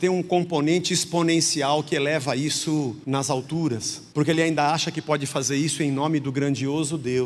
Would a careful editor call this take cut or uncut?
cut